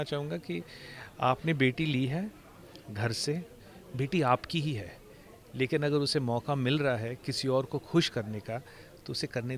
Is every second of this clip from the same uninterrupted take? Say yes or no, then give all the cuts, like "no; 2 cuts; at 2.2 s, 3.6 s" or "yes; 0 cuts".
yes; 0 cuts